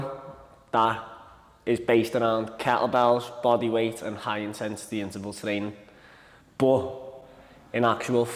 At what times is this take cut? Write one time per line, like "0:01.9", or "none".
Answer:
none